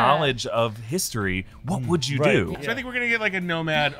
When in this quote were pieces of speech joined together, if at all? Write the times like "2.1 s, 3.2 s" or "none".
2.6 s